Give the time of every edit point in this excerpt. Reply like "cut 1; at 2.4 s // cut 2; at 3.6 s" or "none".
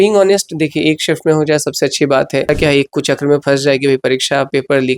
cut 1; at 2.5 s